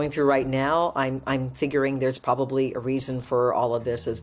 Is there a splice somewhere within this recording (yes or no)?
no